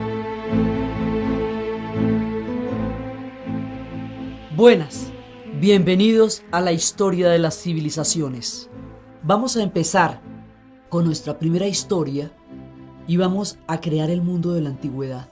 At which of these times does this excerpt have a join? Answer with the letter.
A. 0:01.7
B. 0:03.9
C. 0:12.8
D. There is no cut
A